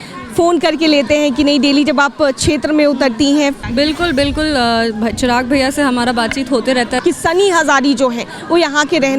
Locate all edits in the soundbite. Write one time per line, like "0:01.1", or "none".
0:03.6
0:06.9